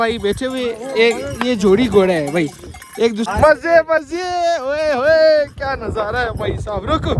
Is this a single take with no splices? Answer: no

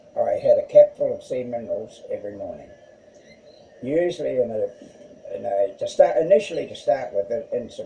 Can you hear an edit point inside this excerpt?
no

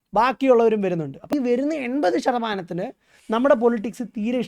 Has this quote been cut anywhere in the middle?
yes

